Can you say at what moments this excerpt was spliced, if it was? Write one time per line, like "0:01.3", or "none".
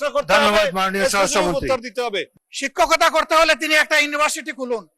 0:02.3